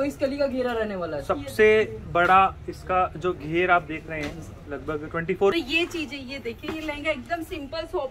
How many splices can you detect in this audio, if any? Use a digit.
1